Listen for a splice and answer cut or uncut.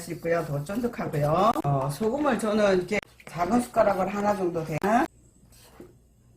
cut